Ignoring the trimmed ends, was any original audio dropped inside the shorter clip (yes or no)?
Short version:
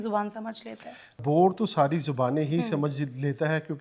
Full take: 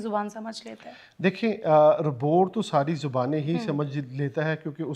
yes